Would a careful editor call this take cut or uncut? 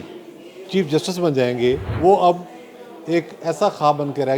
cut